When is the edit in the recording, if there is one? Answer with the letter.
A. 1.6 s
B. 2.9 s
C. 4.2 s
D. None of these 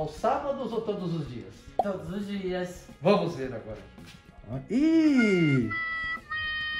C